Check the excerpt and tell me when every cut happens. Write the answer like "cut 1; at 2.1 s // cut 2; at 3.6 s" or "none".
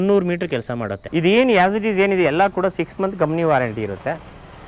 cut 1; at 0.9 s